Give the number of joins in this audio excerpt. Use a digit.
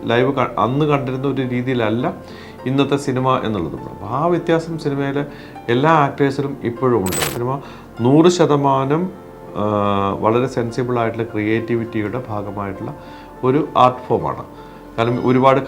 1